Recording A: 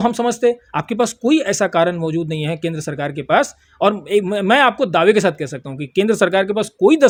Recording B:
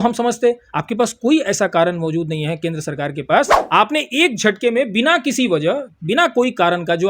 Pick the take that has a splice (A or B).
B